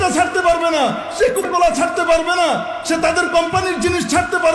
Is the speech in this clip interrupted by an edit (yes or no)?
yes